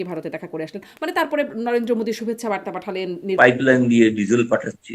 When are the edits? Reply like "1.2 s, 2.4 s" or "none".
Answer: 3.2 s